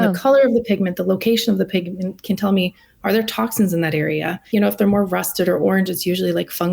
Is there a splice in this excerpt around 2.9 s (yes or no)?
no